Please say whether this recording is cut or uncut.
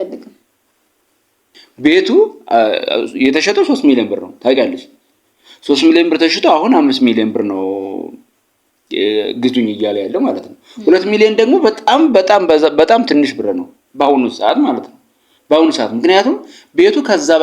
cut